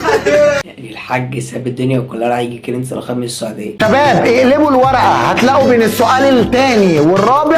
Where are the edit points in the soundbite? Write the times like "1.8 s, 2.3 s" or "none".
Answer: 3.7 s